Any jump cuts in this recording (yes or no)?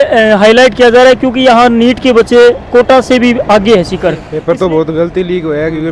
yes